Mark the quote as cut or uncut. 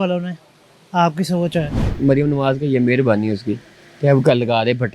cut